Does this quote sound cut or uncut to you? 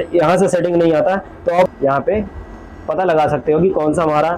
cut